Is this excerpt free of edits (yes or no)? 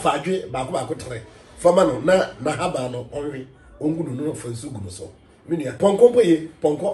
no